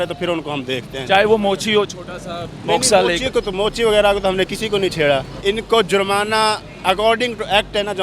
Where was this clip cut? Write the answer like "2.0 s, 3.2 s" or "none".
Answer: 5.3 s